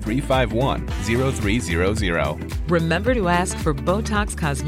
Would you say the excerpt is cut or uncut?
uncut